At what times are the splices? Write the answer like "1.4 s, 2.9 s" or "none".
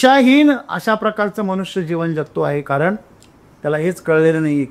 none